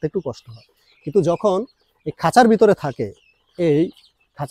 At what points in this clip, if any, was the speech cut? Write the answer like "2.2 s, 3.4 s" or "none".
none